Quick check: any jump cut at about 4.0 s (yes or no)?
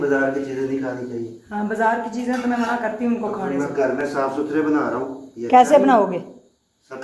no